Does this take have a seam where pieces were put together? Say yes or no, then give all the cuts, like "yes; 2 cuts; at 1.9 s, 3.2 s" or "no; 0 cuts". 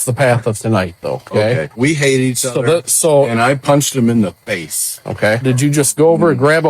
yes; 2 cuts; at 1.7 s, 5.4 s